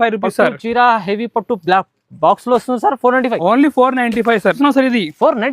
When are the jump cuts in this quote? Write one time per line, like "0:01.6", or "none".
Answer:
0:04.6